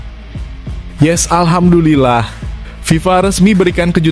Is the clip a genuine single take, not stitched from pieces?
no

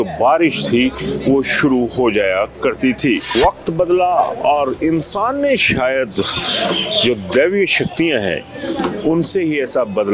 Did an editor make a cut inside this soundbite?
yes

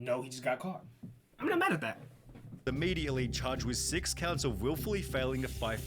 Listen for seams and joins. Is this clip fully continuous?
no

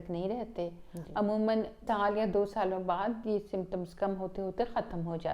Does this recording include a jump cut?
yes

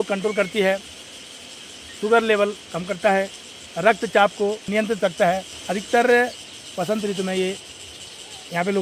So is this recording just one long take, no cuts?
yes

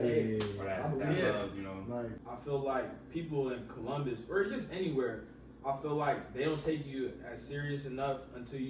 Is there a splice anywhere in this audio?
yes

